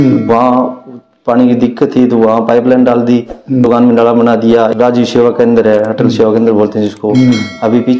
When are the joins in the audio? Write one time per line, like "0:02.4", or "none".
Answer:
0:03.7
0:04.7